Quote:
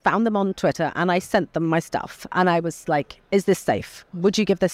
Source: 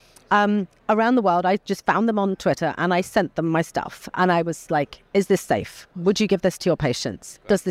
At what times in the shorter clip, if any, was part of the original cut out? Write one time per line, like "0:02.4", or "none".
none